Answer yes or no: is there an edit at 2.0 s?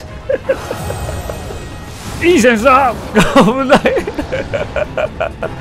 yes